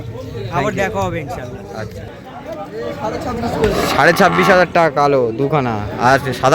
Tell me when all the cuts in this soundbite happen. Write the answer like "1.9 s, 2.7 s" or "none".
2.2 s